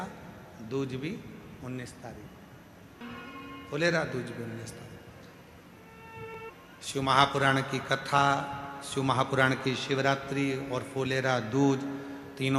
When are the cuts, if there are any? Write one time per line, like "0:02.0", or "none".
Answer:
0:03.0
0:06.3